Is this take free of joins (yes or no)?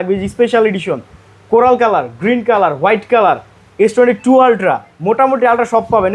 yes